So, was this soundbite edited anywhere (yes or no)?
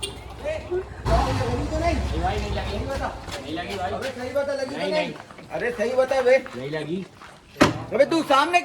yes